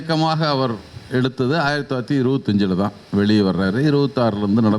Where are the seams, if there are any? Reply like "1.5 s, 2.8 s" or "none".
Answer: none